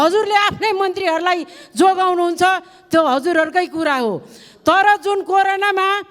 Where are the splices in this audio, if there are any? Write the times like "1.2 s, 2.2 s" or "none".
none